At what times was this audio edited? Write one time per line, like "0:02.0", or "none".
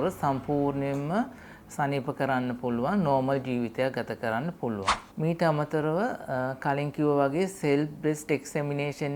0:04.9